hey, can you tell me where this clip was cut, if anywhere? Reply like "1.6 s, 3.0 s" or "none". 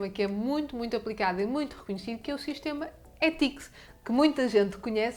none

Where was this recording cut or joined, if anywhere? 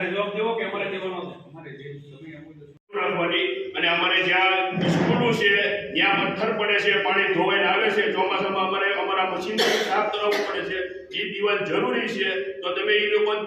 2.8 s

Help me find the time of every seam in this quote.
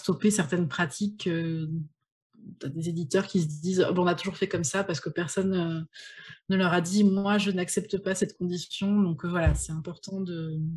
none

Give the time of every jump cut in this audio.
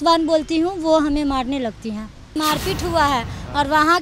2.3 s

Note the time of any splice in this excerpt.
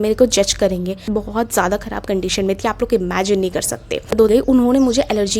1.1 s, 4.3 s

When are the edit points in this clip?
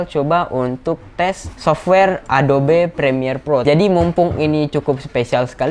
1.5 s, 3.6 s

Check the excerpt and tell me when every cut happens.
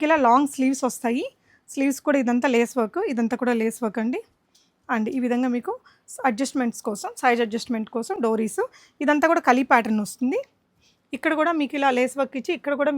none

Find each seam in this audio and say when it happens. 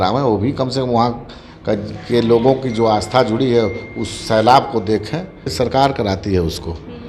5.5 s

